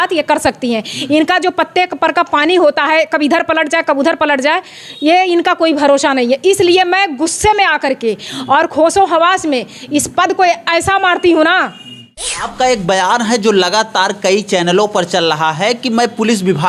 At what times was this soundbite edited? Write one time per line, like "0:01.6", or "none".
0:12.4

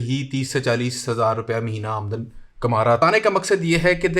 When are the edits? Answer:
0:03.0

